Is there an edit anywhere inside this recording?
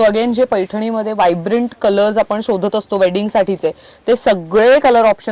no; 0 cuts

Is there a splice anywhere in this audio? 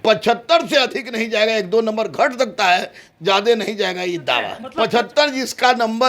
yes; 1 cut; at 4.6 s

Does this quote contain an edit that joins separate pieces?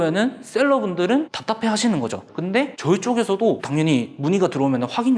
yes; 1 cut; at 2.3 s

